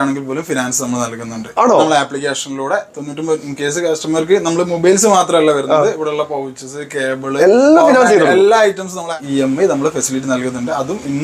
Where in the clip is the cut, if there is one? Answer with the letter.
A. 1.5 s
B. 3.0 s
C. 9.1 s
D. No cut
C